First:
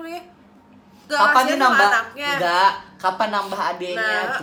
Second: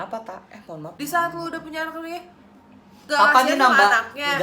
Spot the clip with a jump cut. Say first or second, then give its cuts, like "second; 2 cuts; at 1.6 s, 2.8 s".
second; 1 cut; at 0.9 s